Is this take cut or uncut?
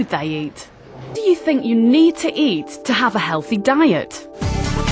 uncut